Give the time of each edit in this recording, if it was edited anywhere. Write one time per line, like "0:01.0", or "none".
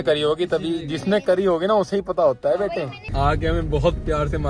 0:03.0